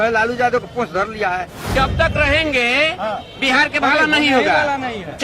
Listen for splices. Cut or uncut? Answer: cut